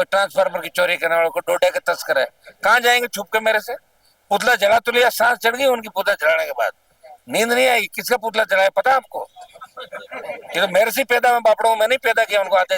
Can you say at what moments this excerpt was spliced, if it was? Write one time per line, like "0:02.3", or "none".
none